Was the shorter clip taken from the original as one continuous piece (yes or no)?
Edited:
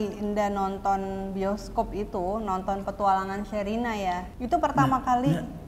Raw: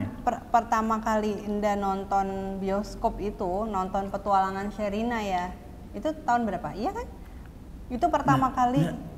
no